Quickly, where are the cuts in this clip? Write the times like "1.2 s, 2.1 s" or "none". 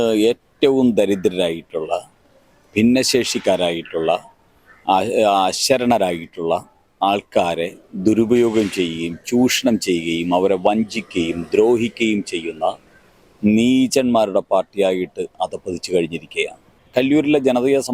16.7 s